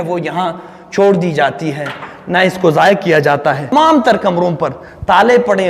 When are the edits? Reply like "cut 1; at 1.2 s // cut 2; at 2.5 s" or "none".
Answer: cut 1; at 3.7 s